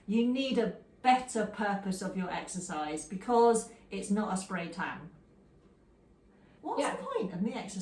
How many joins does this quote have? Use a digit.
1